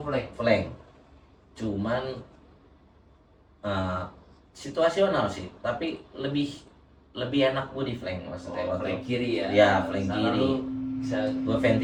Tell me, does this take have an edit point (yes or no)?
no